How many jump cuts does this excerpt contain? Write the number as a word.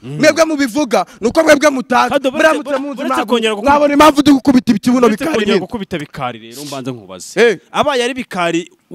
one